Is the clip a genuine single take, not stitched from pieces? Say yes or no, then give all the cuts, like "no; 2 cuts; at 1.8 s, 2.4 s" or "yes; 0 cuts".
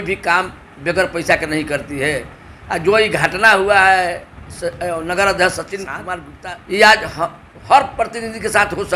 no; 1 cut; at 6.2 s